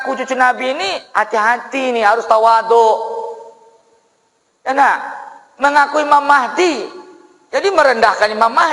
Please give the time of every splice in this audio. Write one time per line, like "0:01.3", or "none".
none